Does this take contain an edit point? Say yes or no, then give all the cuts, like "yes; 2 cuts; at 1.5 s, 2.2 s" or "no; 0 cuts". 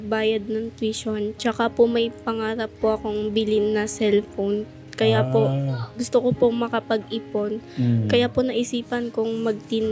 no; 0 cuts